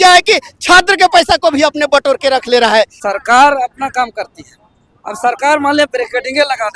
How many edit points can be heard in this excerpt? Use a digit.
1